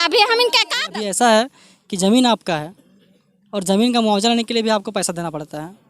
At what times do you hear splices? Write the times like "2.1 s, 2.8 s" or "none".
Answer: 0.9 s